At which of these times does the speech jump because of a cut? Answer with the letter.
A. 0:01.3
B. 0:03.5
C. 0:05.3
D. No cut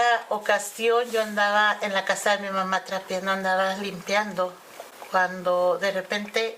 D